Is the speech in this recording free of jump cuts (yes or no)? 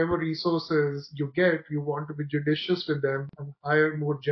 yes